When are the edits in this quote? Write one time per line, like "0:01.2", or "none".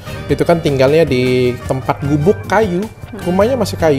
0:01.6